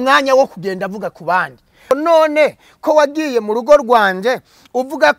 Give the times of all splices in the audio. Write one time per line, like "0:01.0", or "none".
0:01.9